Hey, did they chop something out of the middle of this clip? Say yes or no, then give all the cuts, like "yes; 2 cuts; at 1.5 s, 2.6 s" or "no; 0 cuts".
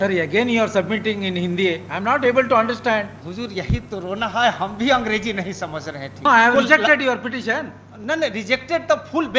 yes; 2 cuts; at 3.2 s, 6.3 s